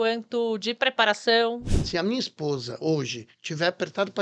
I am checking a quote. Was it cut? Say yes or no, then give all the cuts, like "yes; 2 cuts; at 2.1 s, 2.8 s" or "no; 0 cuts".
yes; 1 cut; at 1.7 s